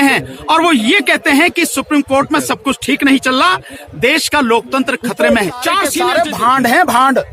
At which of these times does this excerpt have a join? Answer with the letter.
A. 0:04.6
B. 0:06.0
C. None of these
B